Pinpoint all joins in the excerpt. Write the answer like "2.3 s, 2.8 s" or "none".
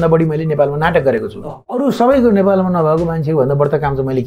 1.6 s